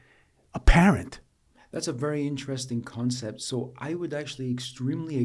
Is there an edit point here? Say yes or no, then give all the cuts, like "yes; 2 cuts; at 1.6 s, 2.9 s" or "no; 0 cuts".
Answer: no; 0 cuts